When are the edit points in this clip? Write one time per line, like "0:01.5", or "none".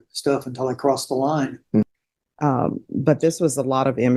0:01.8